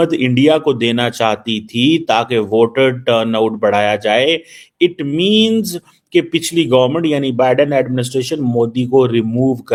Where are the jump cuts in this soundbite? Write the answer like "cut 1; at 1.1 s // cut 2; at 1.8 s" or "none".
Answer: none